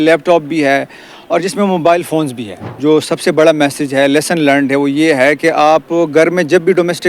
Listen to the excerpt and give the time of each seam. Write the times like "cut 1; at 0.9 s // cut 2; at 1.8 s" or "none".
cut 1; at 2.7 s